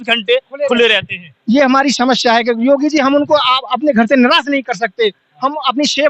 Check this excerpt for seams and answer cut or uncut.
uncut